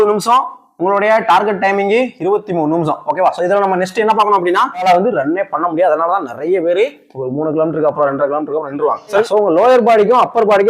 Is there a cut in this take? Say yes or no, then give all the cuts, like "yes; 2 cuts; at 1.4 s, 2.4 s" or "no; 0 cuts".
yes; 2 cuts; at 4.8 s, 9.2 s